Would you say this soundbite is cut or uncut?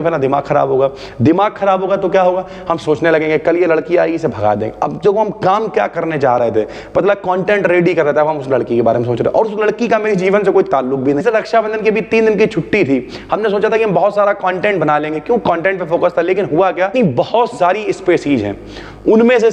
cut